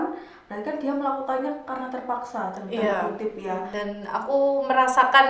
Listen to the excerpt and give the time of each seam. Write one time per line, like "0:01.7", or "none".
0:03.7

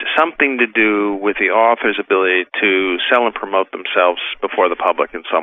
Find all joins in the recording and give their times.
none

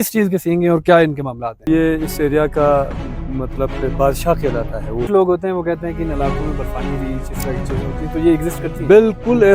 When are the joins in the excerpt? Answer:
0:01.6
0:05.1

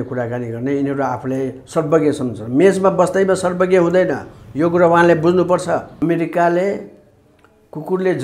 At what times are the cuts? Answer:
0:05.9

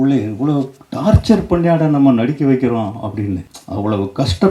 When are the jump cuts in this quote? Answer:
0:03.6

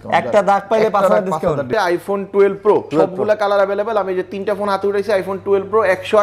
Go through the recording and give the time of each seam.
0:01.7
0:02.9

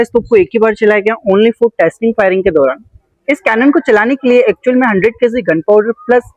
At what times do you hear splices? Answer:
none

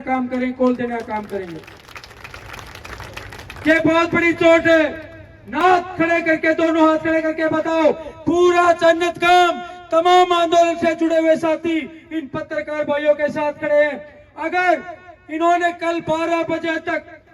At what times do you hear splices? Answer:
0:05.4

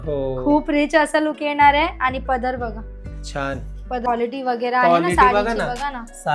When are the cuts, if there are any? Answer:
0:04.1

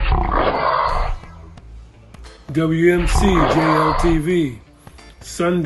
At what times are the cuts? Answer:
0:00.9

